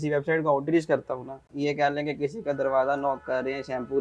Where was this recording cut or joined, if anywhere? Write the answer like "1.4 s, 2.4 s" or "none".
1.4 s